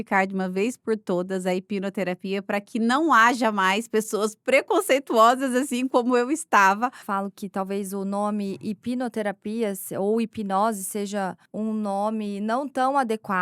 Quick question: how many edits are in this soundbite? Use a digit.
2